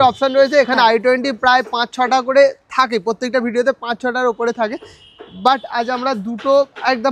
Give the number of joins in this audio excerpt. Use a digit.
0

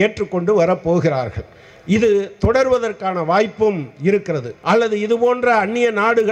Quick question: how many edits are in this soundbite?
1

